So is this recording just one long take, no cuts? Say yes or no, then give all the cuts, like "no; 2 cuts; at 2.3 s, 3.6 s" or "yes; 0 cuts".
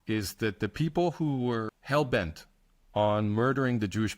no; 1 cut; at 1.8 s